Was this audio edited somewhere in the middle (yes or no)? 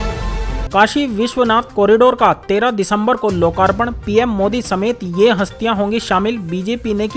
no